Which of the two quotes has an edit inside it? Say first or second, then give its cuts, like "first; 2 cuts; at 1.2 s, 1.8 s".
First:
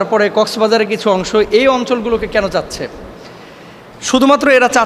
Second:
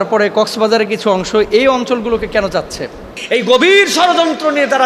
second; 1 cut; at 3.2 s